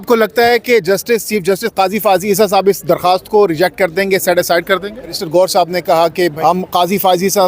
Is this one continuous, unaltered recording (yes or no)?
no